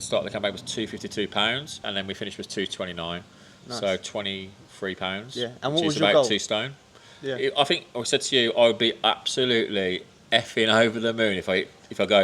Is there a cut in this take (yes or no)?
yes